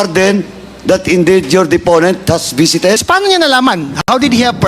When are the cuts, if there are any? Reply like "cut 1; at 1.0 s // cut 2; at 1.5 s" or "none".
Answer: cut 1; at 3.0 s